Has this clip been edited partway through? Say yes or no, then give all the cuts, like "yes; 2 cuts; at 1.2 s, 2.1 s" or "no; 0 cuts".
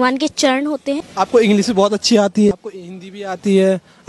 yes; 2 cuts; at 1.0 s, 2.5 s